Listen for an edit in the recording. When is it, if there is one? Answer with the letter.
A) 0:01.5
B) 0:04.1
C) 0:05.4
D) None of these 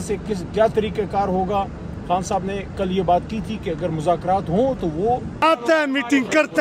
C